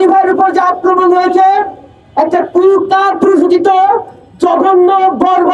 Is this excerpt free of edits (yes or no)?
yes